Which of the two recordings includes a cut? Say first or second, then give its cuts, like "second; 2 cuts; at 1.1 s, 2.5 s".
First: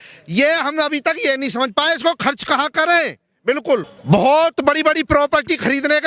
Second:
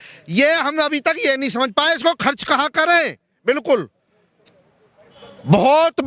first; 1 cut; at 3.9 s